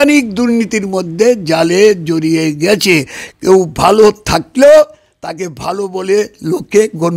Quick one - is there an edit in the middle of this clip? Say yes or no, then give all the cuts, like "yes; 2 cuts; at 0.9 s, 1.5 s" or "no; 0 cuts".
no; 0 cuts